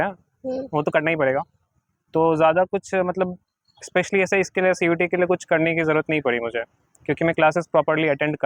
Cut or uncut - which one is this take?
uncut